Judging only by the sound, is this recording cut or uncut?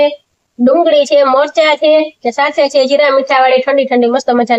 uncut